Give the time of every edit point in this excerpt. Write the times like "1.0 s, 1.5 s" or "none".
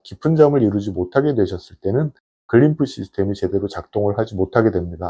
none